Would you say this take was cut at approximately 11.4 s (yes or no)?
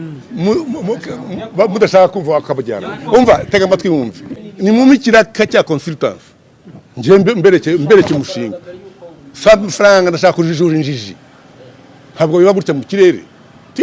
no